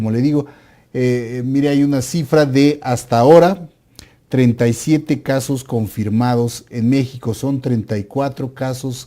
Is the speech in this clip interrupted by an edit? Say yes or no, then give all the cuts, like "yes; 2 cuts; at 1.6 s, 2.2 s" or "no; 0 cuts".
yes; 1 cut; at 4.9 s